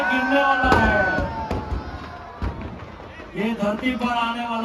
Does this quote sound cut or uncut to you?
uncut